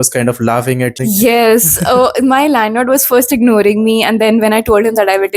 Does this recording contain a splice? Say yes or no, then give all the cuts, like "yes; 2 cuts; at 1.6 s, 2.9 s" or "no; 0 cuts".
yes; 1 cut; at 1.0 s